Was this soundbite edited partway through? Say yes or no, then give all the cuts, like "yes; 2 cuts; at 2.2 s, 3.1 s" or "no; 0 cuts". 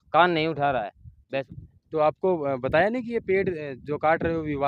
yes; 1 cut; at 1.5 s